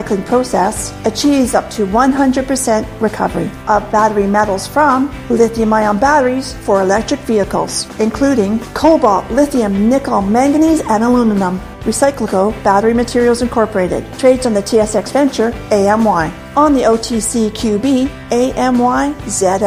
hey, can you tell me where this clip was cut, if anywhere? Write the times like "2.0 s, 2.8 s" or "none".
none